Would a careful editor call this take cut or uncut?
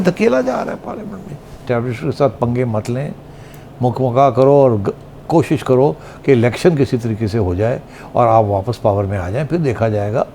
cut